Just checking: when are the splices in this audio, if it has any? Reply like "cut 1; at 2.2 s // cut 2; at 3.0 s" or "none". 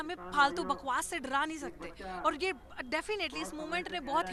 none